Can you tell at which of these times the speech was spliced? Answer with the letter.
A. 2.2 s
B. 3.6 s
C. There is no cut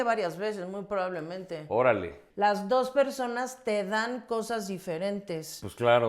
A